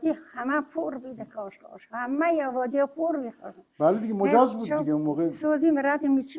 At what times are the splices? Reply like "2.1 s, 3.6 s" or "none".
none